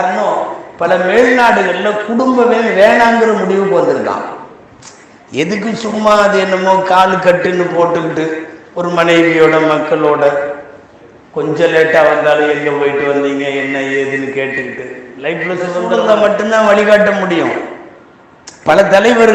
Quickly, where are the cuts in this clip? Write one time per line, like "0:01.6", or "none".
0:15.9